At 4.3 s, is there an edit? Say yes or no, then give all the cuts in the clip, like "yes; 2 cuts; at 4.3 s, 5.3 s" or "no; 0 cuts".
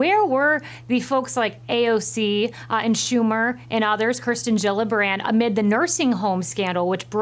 no; 0 cuts